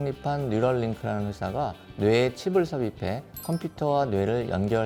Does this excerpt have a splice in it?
no; 0 cuts

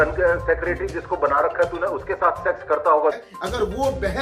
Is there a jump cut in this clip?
yes; 1 cut; at 3.3 s

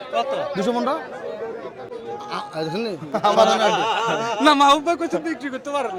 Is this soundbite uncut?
yes; 0 cuts

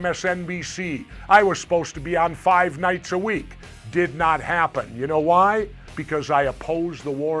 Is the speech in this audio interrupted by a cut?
no; 0 cuts

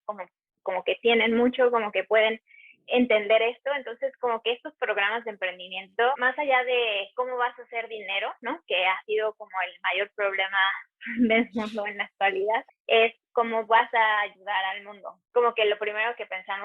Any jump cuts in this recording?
yes; 3 cuts; at 6.2 s, 12.7 s, 15.1 s

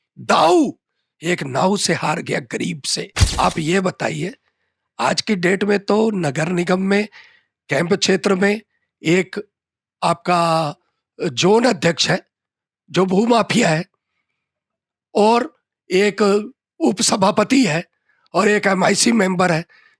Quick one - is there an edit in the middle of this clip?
yes; 1 cut; at 3.2 s

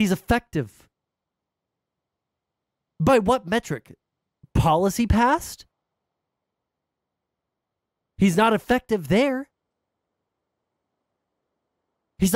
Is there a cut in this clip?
no; 0 cuts

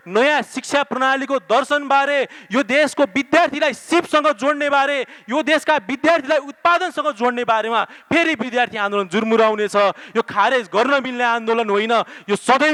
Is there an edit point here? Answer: no; 0 cuts

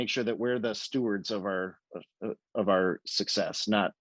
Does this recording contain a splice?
no; 0 cuts

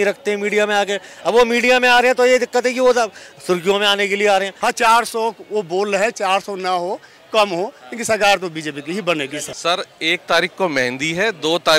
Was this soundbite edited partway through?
yes; 2 cuts; at 4.5 s, 9.5 s

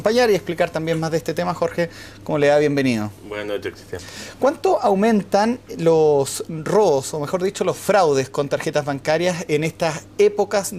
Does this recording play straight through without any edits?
no; 1 cut; at 1.9 s

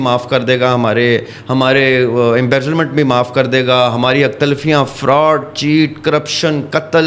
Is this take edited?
no; 0 cuts

